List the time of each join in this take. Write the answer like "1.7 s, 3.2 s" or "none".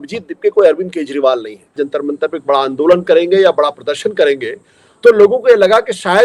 1.8 s